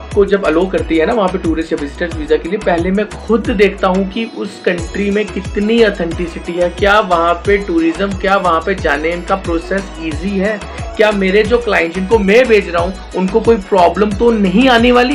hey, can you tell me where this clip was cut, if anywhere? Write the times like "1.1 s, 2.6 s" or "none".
none